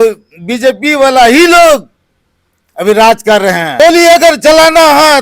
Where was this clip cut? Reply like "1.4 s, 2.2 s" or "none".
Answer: 3.7 s

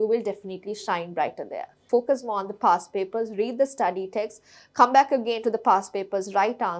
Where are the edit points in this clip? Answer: 1.8 s

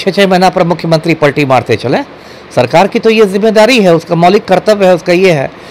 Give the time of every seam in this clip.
none

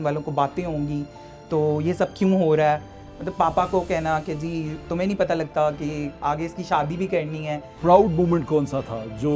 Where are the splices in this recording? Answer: 7.8 s

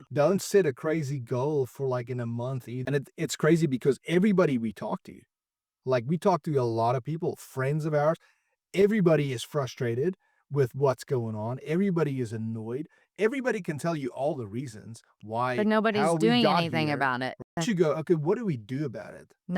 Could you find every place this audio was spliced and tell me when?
2.7 s, 17.5 s

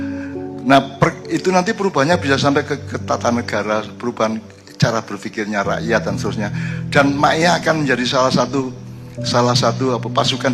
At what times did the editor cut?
1.2 s

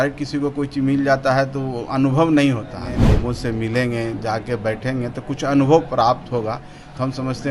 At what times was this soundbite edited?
3.1 s

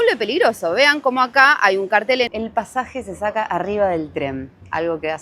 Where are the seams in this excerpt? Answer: 2.3 s

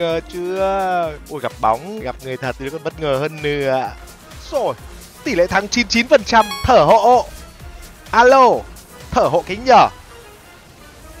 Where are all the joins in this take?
1.2 s, 1.9 s, 4.1 s

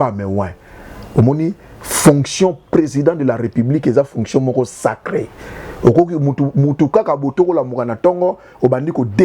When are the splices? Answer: none

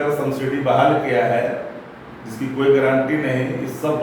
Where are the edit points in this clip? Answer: none

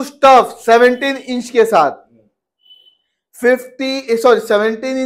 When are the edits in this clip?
none

